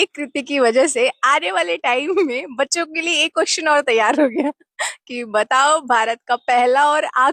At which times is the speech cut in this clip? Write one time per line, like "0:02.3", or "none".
none